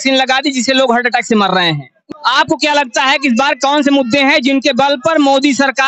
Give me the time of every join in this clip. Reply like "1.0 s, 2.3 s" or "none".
2.0 s